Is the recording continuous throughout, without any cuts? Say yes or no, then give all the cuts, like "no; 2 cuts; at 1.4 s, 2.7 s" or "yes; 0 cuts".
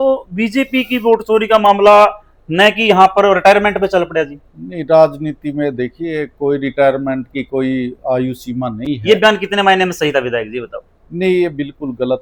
yes; 0 cuts